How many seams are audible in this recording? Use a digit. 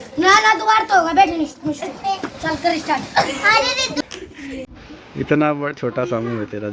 1